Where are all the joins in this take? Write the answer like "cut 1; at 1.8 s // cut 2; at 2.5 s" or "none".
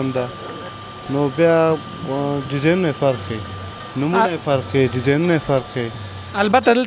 none